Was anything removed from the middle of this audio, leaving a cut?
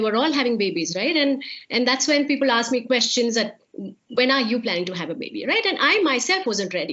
yes; 1 cut; at 3.6 s

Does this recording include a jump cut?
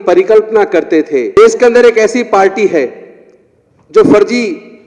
yes; 1 cut; at 1.4 s

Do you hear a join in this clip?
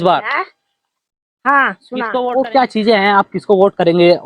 yes; 1 cut; at 2.2 s

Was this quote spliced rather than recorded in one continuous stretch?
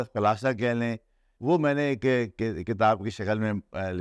yes; 1 cut; at 1.2 s

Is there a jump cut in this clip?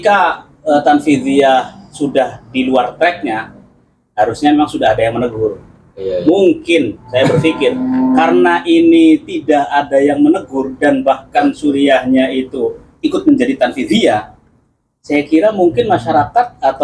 no; 0 cuts

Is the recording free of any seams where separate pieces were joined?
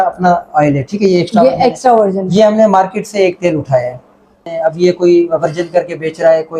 no; 1 cut; at 4.4 s

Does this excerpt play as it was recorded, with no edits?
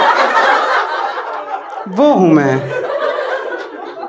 yes; 0 cuts

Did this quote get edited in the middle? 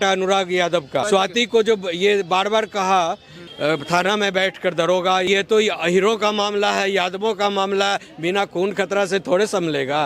yes; 3 cuts; at 1.0 s, 3.4 s, 5.3 s

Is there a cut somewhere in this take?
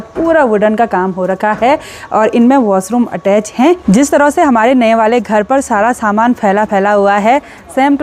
no; 0 cuts

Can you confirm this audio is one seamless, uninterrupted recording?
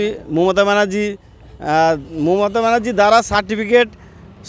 yes; 0 cuts

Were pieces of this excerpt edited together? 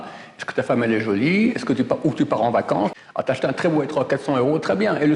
yes; 1 cut; at 2.9 s

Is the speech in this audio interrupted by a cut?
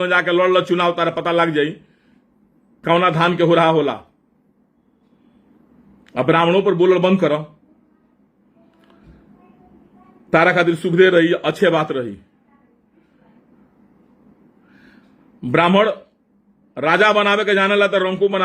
no; 0 cuts

